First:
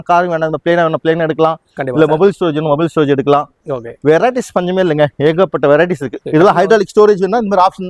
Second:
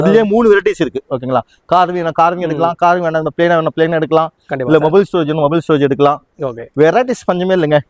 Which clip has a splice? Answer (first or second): first